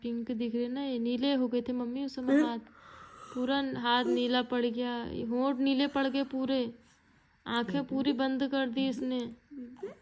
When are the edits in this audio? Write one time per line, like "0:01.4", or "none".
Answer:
none